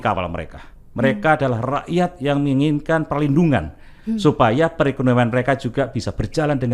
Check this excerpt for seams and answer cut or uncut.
uncut